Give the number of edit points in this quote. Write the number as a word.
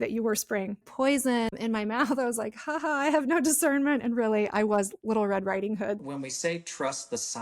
three